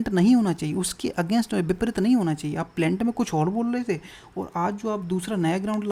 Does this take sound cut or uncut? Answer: uncut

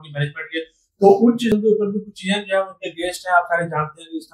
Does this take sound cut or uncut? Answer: cut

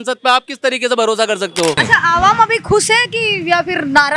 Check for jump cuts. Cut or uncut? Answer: cut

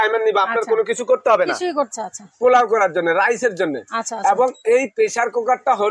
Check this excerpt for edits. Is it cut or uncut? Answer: cut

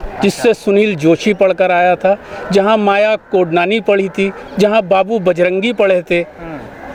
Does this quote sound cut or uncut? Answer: uncut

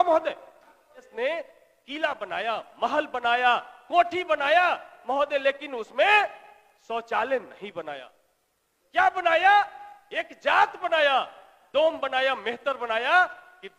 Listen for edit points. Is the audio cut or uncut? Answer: cut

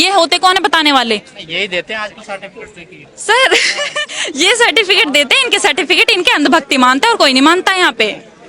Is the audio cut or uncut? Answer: uncut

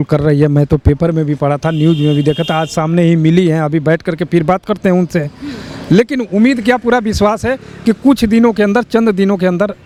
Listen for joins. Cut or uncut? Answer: uncut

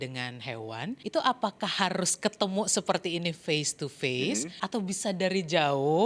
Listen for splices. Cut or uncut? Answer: cut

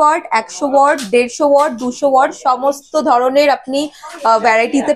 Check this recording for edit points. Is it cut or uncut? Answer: uncut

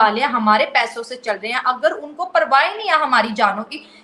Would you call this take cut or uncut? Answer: uncut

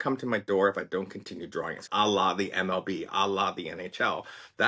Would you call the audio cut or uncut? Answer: cut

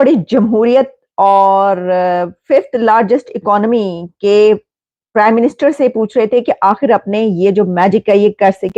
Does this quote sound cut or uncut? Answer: uncut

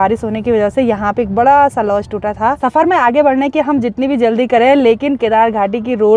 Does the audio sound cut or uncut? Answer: cut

